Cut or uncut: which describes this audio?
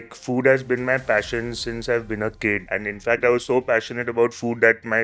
cut